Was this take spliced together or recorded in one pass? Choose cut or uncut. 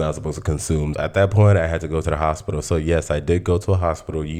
uncut